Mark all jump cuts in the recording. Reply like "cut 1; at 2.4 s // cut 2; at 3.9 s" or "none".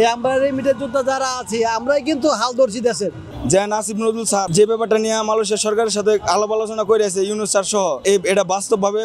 cut 1; at 3.3 s // cut 2; at 4.5 s // cut 3; at 8.0 s